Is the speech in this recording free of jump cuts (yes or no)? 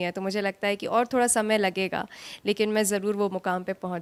yes